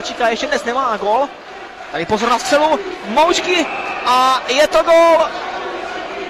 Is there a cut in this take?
no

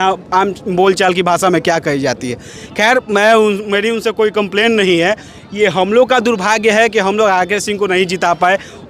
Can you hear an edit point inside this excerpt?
no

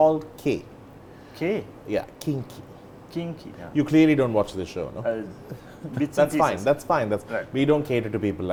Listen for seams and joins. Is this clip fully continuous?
yes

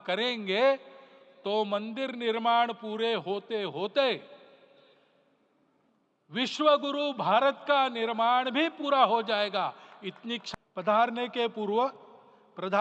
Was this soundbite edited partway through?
yes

